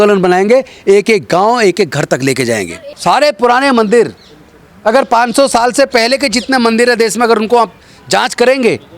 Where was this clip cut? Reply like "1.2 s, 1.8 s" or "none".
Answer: 2.8 s

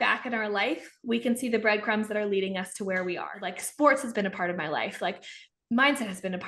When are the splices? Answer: 3.6 s

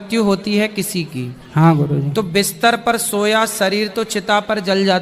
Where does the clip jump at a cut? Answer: none

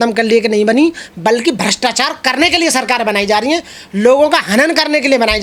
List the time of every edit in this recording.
none

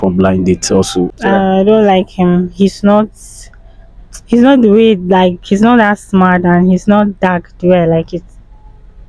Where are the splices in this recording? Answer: 1.1 s

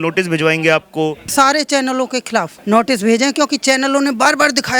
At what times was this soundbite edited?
1.3 s

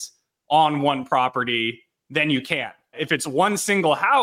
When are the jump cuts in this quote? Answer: 3.0 s

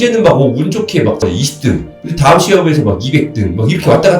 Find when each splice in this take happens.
1.2 s

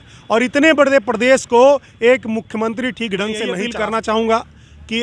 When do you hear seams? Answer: 3.6 s

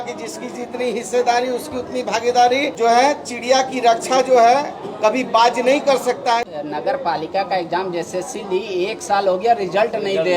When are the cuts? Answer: 2.7 s, 6.4 s

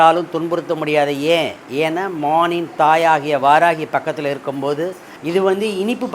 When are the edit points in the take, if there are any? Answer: 5.1 s

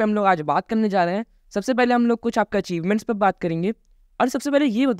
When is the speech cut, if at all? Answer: none

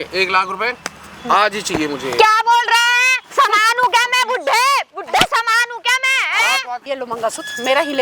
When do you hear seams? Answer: 3.1 s, 6.8 s

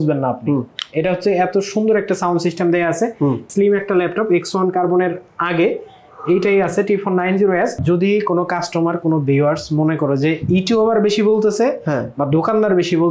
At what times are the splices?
3.5 s, 7.8 s

